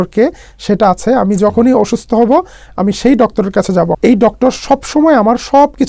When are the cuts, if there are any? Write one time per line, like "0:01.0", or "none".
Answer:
0:03.9